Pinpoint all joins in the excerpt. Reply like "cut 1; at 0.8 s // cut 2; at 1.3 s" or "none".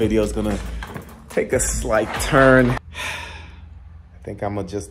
cut 1; at 2.7 s